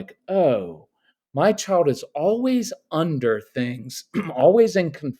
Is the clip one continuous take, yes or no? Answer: yes